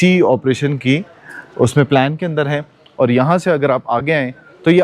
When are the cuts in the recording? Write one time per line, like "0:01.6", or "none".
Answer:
none